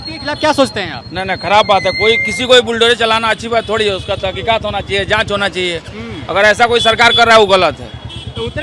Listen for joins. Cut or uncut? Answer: uncut